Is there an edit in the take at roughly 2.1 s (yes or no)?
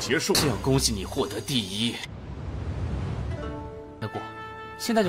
yes